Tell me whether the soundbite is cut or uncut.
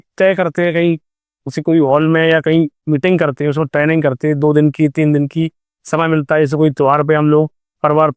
uncut